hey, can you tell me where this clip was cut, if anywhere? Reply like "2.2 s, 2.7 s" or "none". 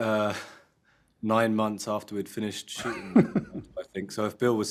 none

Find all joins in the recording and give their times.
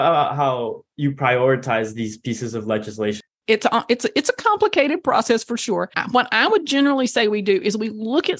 3.3 s, 6.0 s

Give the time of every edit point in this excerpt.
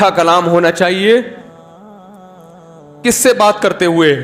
none

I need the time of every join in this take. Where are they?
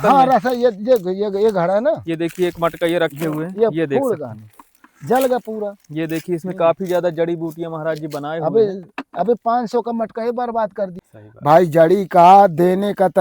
11.0 s

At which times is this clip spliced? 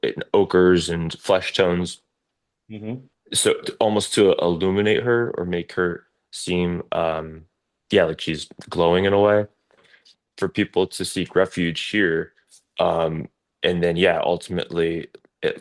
9.9 s

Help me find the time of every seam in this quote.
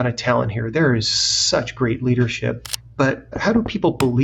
3.2 s

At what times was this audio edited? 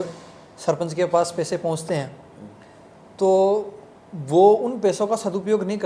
none

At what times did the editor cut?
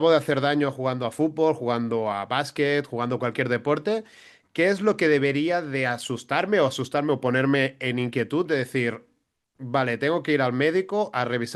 none

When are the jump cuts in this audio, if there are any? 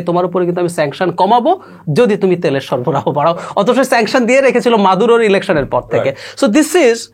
none

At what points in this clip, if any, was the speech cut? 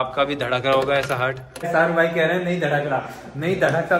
1.7 s

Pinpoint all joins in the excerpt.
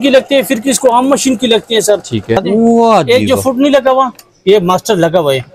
2.4 s

